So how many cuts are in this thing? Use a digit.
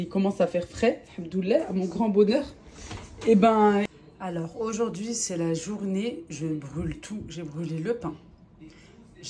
1